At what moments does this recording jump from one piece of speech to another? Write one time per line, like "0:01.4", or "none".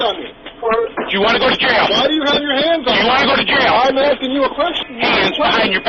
0:04.8